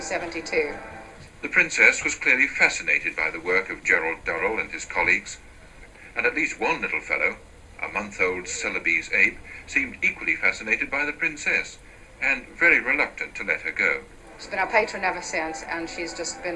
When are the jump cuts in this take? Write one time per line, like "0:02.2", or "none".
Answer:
0:10.1